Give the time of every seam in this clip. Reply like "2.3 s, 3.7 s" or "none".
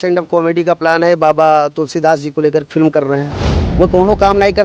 3.6 s